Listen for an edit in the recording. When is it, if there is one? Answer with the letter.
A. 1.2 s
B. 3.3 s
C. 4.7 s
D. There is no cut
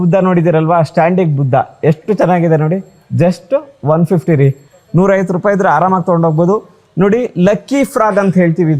D